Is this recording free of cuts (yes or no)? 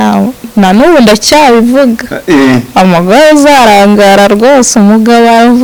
yes